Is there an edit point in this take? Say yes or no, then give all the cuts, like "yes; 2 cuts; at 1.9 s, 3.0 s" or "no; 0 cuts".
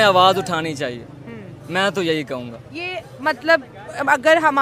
no; 0 cuts